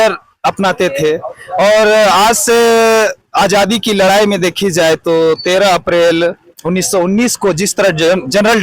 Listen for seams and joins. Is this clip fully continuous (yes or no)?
yes